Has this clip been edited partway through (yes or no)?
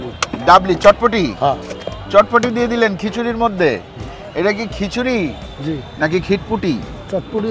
no